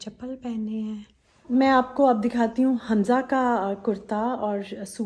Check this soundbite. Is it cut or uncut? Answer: cut